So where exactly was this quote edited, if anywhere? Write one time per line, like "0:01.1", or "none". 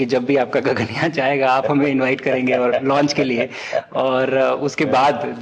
none